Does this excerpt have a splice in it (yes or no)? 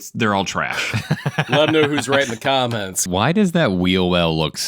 yes